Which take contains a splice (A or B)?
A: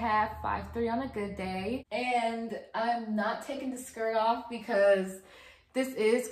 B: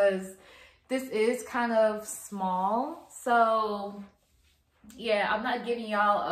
A